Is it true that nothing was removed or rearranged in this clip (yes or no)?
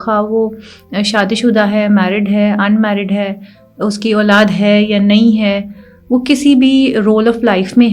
yes